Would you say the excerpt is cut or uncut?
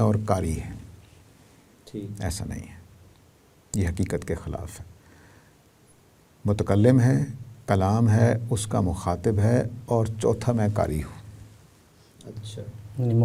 uncut